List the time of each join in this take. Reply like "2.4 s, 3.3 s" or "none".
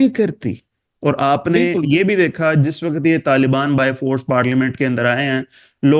none